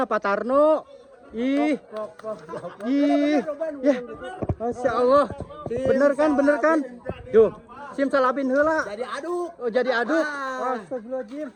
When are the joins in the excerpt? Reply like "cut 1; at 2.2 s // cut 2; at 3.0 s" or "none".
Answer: none